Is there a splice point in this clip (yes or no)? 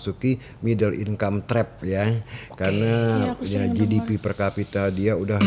no